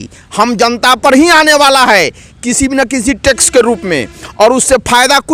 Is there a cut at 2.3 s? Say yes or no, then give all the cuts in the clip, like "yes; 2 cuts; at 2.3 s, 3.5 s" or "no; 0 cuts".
no; 0 cuts